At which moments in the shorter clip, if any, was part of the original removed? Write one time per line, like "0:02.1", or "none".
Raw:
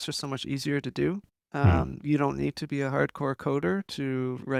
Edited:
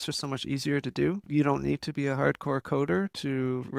0:01.2